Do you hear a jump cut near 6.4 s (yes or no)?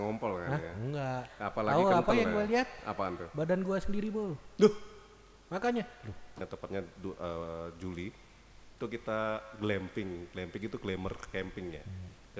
yes